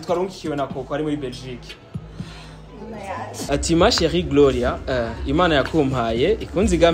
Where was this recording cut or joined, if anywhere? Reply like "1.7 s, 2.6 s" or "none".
3.5 s